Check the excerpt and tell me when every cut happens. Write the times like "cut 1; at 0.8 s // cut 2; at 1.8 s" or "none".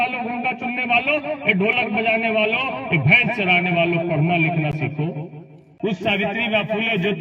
cut 1; at 5.6 s